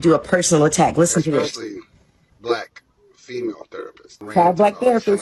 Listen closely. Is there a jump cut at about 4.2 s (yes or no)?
yes